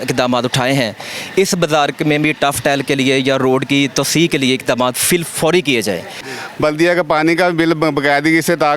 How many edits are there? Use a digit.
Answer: 1